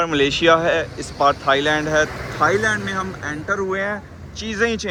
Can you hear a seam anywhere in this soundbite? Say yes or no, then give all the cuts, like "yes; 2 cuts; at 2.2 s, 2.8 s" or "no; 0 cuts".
no; 0 cuts